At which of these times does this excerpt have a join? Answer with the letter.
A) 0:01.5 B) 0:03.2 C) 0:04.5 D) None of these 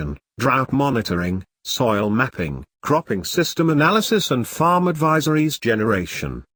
D